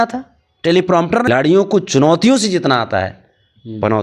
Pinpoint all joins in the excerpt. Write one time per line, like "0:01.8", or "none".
0:01.3